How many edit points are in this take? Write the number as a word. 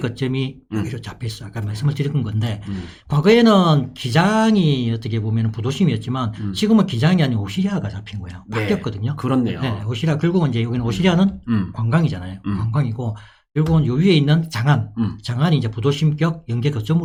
zero